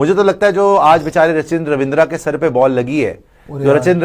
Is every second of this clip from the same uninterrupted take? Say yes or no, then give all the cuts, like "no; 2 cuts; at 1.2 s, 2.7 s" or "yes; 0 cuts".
yes; 0 cuts